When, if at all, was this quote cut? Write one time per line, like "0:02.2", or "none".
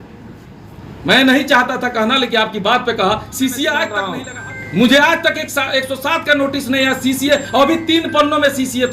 0:04.0